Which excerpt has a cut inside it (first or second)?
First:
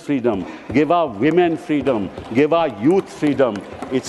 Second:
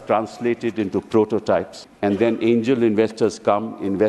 second